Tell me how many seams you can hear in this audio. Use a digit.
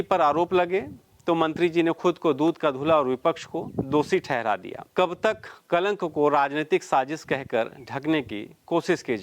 1